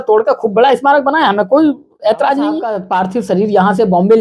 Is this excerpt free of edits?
no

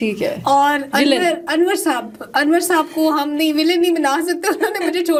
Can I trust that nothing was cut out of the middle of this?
yes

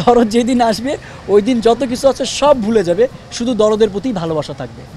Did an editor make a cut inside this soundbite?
no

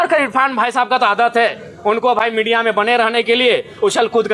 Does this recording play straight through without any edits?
yes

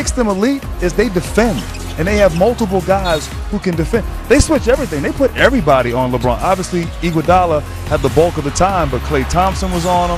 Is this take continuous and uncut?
yes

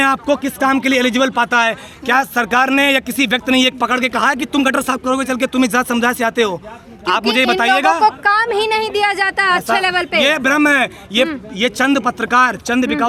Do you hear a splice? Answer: no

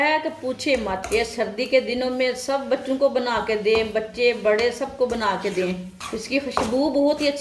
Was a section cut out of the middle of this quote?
yes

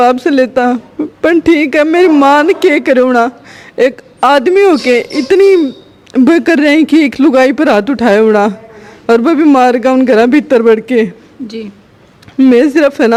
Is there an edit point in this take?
no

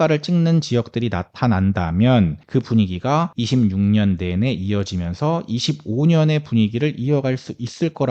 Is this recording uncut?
no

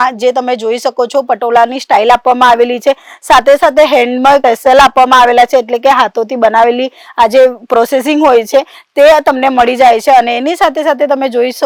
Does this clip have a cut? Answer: no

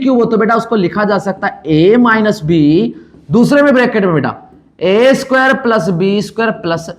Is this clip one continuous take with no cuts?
yes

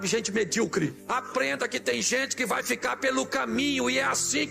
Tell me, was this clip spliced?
yes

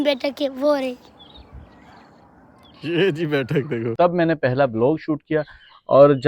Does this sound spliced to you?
yes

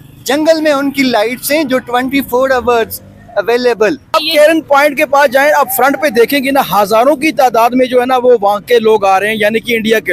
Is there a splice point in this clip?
yes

